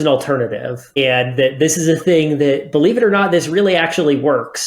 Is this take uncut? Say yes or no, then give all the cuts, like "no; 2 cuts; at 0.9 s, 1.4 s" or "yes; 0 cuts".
no; 1 cut; at 1.0 s